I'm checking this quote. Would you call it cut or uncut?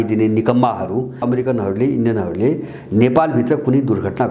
cut